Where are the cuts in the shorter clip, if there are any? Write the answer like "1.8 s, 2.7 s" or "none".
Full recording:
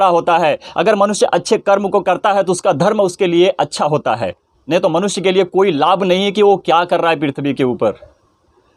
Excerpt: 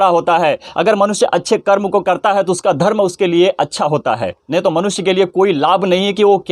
4.3 s